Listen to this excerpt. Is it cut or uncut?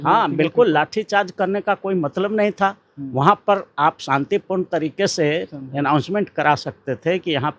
uncut